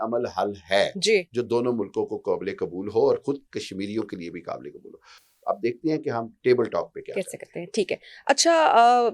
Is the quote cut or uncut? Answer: uncut